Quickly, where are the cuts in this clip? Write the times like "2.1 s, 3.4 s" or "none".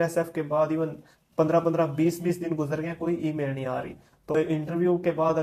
4.3 s